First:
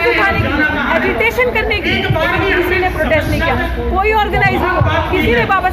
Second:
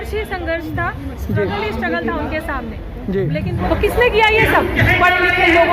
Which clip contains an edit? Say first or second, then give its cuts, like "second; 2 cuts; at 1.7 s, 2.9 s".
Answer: second; 1 cut; at 3.6 s